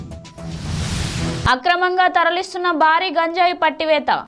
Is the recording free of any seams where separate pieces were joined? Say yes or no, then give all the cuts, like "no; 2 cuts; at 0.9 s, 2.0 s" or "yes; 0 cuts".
no; 1 cut; at 1.4 s